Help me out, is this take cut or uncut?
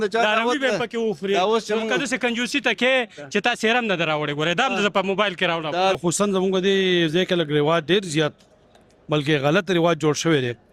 cut